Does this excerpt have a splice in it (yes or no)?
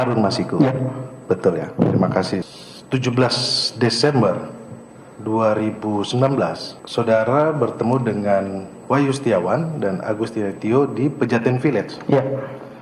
yes